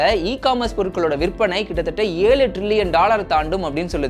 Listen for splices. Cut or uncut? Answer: uncut